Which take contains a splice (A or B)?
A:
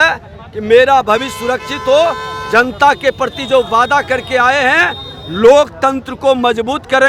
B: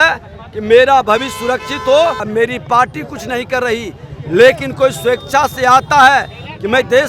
B